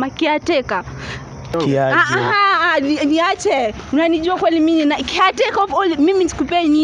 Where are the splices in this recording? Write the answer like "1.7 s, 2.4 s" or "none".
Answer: 1.5 s